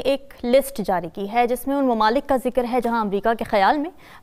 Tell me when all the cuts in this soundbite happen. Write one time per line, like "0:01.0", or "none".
none